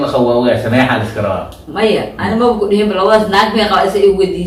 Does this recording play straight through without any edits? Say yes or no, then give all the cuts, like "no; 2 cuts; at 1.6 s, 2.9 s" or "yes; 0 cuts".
yes; 0 cuts